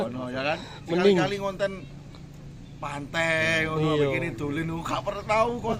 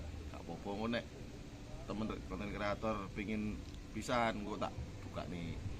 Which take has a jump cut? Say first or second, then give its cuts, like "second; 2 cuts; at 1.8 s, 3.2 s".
second; 1 cut; at 2.1 s